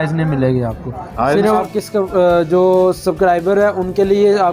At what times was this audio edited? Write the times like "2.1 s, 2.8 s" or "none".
1.6 s